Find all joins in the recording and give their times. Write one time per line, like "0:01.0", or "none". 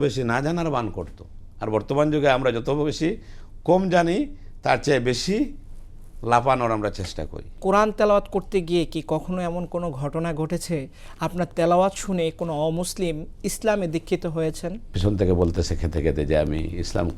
0:07.6
0:15.0